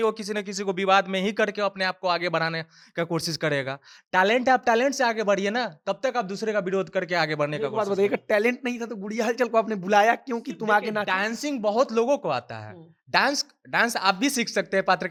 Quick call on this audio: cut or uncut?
uncut